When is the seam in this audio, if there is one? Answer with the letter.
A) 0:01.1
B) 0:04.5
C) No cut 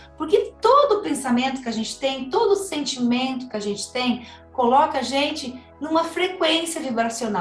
C